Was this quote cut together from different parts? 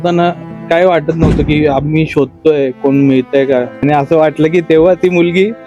yes; 1 cut; at 3.8 s

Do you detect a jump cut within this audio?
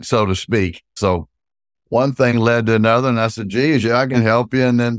yes; 1 cut; at 0.9 s

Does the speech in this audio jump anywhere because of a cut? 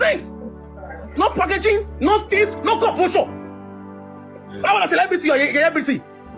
no; 0 cuts

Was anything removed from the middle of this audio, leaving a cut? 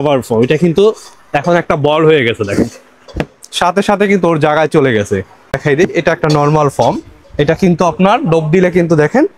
yes; 1 cut; at 5.6 s

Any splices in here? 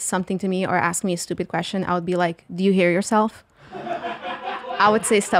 no; 0 cuts

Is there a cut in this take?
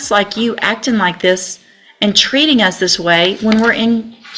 no; 0 cuts

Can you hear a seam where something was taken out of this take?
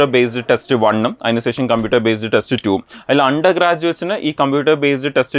no; 0 cuts

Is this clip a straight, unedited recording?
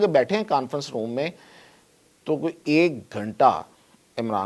yes; 0 cuts

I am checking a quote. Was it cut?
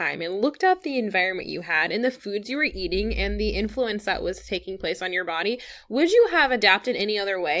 no; 0 cuts

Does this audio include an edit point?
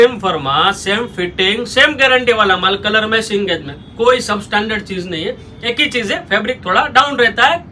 no; 0 cuts

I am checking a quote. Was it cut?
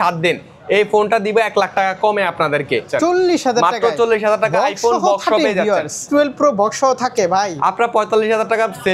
yes; 2 cuts; at 2.9 s, 6.0 s

